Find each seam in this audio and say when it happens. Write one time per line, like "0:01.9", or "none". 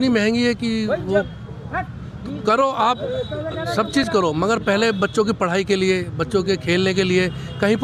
none